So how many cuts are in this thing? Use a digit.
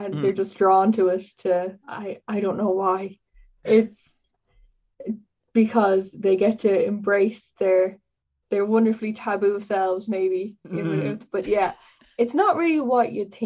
0